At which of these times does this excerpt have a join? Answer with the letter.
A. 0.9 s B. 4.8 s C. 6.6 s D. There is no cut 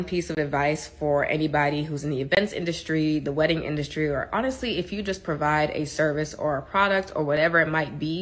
D